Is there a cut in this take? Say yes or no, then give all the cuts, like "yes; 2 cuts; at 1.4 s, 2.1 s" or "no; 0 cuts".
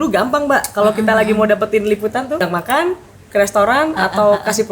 yes; 1 cut; at 2.4 s